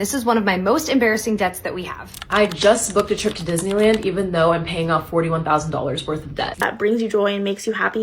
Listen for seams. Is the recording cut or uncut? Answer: cut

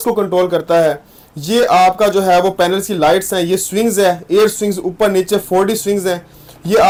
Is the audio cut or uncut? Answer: uncut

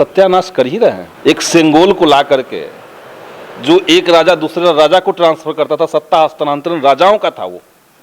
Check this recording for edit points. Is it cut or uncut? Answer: cut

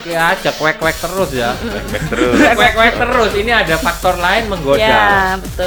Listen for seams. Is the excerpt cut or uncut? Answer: uncut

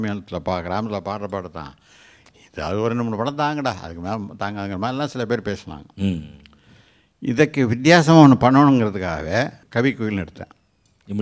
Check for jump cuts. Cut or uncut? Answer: cut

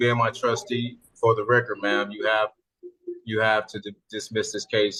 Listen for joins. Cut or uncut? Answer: uncut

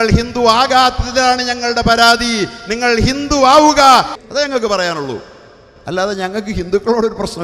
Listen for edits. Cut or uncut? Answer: cut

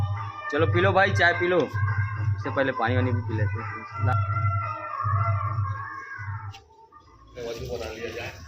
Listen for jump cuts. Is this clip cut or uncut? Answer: uncut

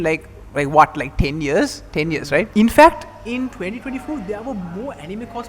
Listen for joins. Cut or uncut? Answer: cut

